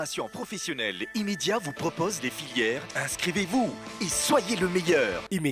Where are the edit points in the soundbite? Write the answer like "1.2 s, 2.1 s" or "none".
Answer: none